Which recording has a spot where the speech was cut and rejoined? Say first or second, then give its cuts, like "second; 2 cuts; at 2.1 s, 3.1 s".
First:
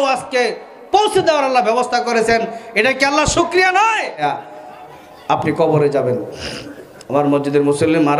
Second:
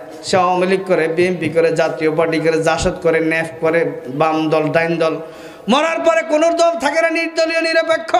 first; 1 cut; at 4.2 s